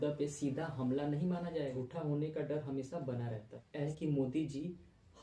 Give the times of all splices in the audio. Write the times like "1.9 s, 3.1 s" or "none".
1.8 s, 3.9 s